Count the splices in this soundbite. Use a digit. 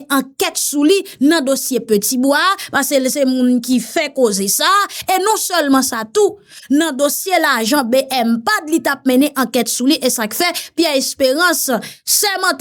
0